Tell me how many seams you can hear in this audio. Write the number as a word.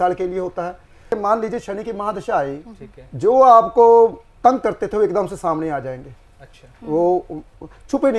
one